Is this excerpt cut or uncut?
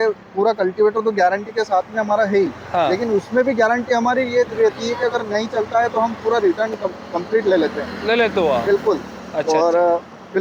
uncut